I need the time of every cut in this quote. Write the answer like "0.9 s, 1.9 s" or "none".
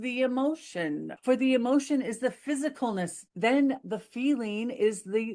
1.1 s, 3.2 s